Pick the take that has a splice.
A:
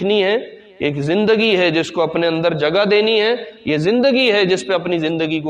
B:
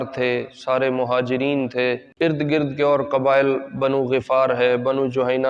B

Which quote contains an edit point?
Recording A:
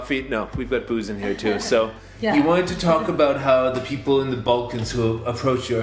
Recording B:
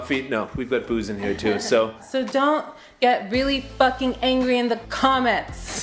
B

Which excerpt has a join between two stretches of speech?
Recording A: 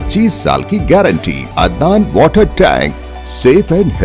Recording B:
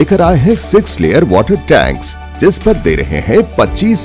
A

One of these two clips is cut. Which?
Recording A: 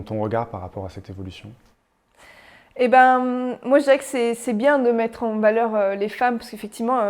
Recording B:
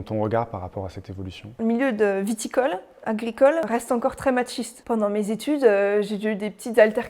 B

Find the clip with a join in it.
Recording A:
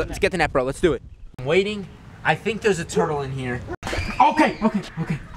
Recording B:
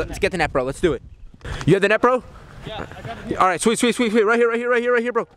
A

